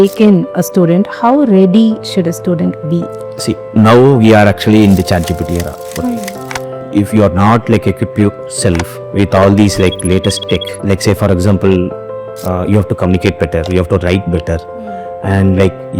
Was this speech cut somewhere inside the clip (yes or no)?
yes